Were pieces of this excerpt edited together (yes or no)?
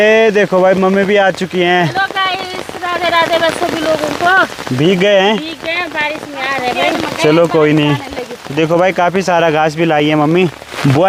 no